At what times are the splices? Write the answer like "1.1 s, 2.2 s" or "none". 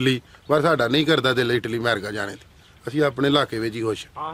none